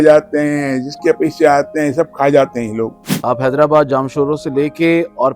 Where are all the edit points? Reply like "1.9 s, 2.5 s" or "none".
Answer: 3.1 s